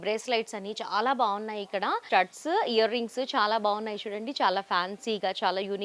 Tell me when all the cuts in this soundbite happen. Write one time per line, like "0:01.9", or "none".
0:02.0